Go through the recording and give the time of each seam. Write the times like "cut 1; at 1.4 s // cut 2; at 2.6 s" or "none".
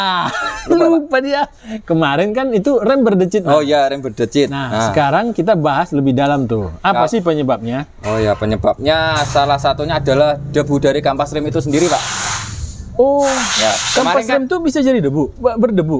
none